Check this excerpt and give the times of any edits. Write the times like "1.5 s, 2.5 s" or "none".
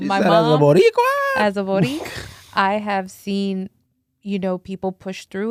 none